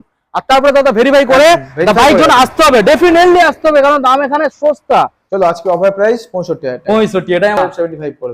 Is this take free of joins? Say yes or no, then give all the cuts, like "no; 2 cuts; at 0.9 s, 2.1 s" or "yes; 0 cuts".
no; 2 cuts; at 5.2 s, 7.6 s